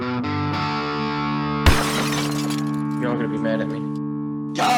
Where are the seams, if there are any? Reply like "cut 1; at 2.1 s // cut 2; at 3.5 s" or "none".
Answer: none